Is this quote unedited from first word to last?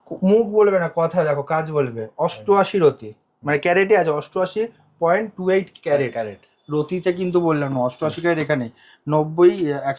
yes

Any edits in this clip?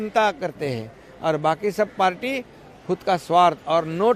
no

